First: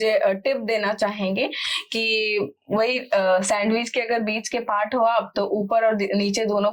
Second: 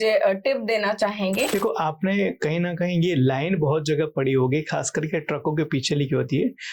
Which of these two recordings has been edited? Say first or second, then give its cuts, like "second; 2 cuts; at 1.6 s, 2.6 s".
second; 1 cut; at 1.5 s